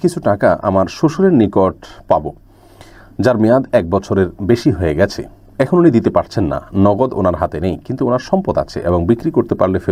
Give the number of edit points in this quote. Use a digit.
0